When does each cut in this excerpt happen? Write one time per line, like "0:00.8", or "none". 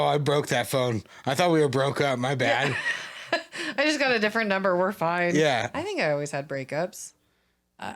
0:05.7